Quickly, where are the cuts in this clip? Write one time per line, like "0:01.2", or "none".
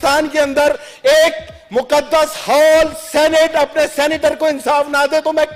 none